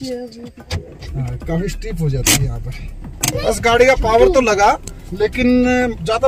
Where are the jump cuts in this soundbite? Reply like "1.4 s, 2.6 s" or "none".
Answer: 3.3 s